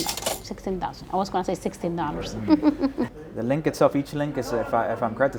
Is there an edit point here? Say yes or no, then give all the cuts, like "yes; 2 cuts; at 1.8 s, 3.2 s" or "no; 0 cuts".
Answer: no; 0 cuts